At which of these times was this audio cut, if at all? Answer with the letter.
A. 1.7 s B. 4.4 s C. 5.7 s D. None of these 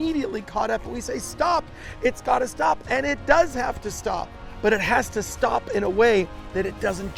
B